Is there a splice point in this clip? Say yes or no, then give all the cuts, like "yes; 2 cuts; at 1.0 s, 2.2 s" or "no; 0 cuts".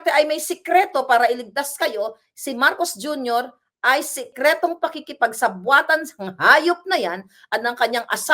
yes; 1 cut; at 4.3 s